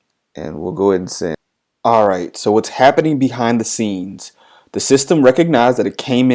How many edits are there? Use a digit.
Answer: 1